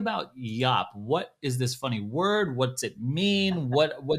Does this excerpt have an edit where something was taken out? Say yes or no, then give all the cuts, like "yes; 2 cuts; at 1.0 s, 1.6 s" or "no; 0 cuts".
no; 0 cuts